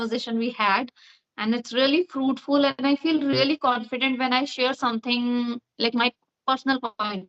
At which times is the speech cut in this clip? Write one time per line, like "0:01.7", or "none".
none